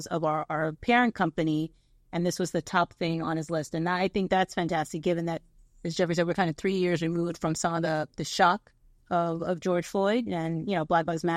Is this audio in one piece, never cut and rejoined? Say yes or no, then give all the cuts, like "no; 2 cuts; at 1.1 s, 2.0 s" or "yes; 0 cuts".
yes; 0 cuts